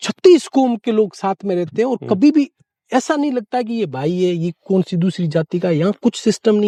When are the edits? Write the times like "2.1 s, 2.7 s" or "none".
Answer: none